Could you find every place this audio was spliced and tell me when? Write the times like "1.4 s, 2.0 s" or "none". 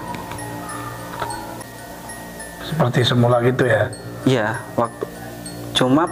1.6 s